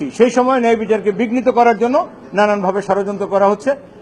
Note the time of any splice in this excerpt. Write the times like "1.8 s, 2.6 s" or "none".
none

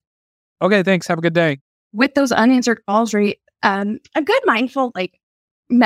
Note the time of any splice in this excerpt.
1.6 s

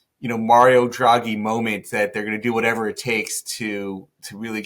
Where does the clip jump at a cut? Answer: none

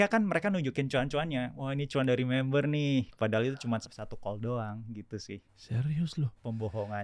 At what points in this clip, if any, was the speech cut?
3.8 s, 5.6 s

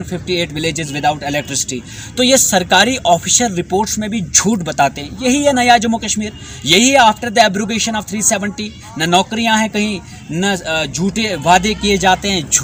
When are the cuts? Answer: none

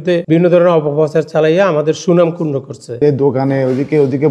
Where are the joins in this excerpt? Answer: 3.0 s

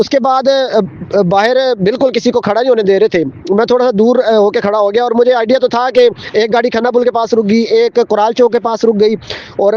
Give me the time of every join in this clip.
6.2 s

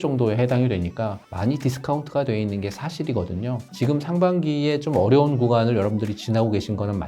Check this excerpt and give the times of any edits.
1.2 s, 3.7 s

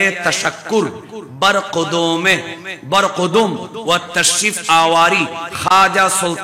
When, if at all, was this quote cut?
none

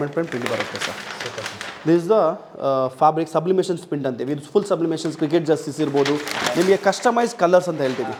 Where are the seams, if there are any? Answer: none

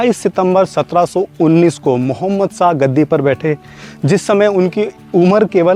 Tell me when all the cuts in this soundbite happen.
none

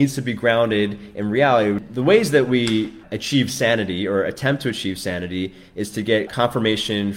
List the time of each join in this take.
1.9 s, 3.1 s, 6.3 s

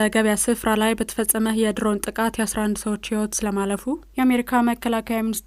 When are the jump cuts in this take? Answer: 4.1 s

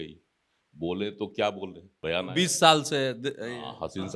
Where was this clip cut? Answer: 1.9 s

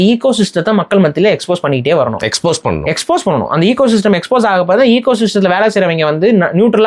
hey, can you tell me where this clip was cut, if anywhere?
none

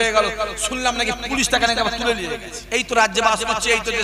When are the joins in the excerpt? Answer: 2.5 s

